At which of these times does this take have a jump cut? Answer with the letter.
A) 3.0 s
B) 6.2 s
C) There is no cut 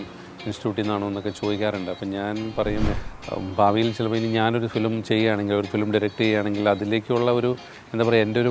A